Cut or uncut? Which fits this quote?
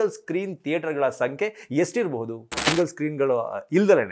cut